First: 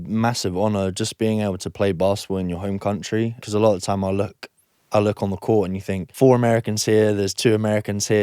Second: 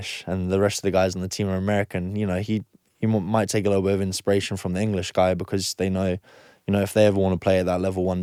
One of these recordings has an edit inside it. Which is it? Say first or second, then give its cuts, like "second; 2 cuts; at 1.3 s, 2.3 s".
first; 2 cuts; at 3.4 s, 6.0 s